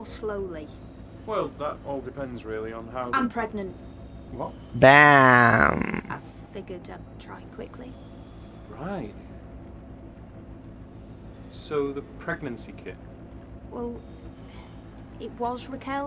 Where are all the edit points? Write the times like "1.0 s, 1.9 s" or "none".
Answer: none